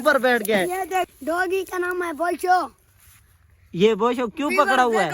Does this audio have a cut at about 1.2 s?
yes; 1 cut; at 1.2 s

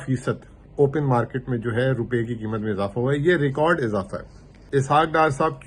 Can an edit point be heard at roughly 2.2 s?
no; 1 cut; at 4.6 s

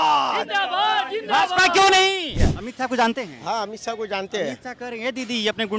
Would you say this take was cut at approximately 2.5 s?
yes; 1 cut; at 2.5 s

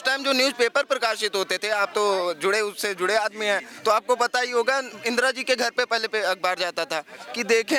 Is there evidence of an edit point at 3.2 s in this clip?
no; 0 cuts

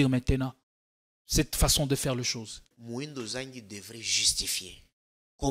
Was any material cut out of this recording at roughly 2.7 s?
yes; 1 cut; at 2.7 s

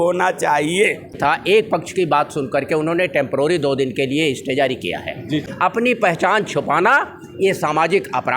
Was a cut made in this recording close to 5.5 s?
yes; 2 cuts; at 1.4 s, 5.5 s

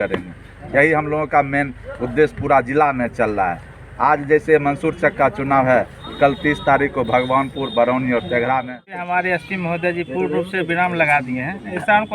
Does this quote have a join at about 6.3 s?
no; 1 cut; at 9.0 s

